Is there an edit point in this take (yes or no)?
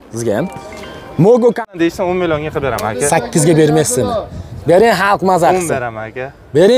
yes